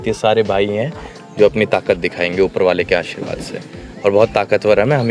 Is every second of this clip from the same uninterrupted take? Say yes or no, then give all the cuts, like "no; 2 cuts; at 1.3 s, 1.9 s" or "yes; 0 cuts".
yes; 0 cuts